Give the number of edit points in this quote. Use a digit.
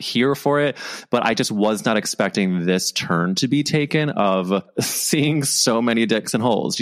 1